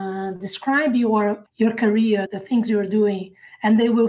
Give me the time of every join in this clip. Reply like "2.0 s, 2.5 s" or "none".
1.4 s, 2.3 s